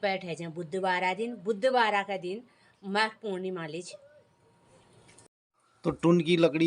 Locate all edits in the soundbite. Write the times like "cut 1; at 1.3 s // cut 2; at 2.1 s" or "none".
cut 1; at 5.0 s